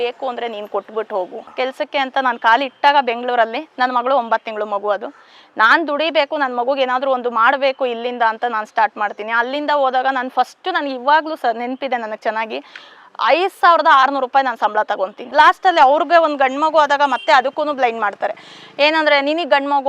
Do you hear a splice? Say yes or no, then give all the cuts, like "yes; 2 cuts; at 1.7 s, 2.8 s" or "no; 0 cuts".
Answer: yes; 2 cuts; at 1.4 s, 15.2 s